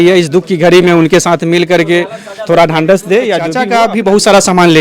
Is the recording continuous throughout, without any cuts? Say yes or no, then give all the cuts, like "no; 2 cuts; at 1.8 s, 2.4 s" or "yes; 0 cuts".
no; 1 cut; at 3.6 s